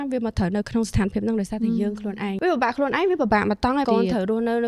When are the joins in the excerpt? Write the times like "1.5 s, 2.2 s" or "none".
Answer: 2.4 s, 3.9 s